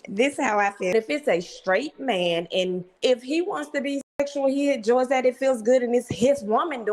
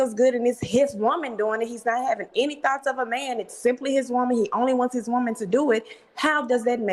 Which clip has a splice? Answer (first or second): first